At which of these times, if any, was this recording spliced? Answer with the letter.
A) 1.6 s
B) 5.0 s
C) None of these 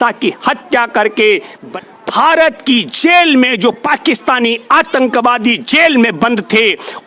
A